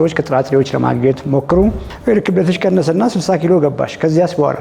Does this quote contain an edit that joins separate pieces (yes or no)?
yes